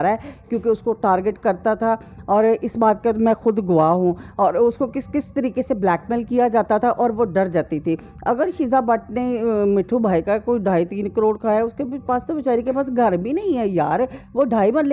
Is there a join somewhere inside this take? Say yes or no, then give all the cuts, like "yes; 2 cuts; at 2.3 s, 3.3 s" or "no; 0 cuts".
no; 0 cuts